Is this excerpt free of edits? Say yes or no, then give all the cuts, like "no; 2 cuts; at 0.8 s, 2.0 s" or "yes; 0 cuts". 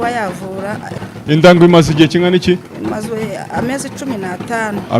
no; 1 cut; at 0.9 s